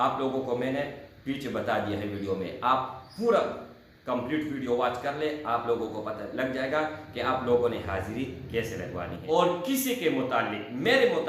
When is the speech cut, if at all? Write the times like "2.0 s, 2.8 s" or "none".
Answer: 9.3 s